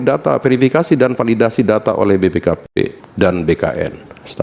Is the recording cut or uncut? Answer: cut